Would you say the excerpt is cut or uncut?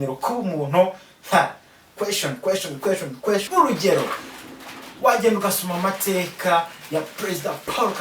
cut